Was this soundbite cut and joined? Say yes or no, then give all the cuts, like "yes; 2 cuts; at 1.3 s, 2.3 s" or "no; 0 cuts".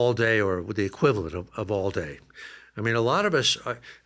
no; 0 cuts